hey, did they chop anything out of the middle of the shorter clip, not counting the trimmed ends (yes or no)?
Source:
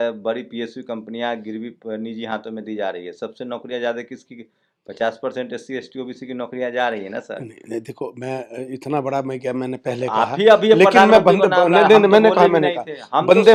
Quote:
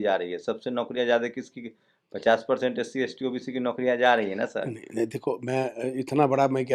no